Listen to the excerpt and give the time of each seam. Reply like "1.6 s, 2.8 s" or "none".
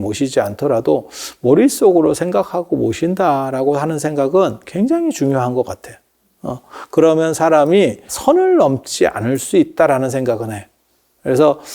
8.1 s